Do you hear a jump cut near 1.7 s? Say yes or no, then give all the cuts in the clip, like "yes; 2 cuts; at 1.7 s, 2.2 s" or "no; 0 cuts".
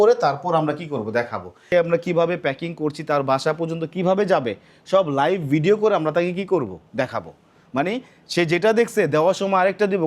yes; 1 cut; at 1.7 s